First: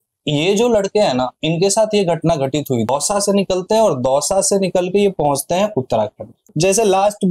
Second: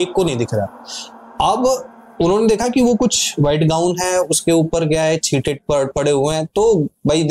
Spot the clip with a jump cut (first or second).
first